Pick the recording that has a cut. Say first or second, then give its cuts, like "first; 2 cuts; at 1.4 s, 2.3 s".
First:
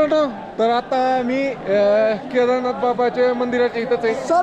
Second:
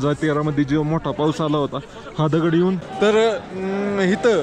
second; 1 cut; at 2.9 s